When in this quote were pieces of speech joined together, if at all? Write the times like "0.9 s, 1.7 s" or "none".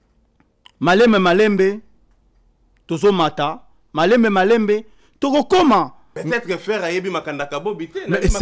6.0 s